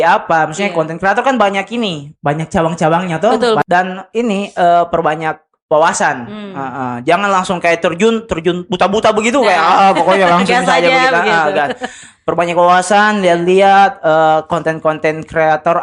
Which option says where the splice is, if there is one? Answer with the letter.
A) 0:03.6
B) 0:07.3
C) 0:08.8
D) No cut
A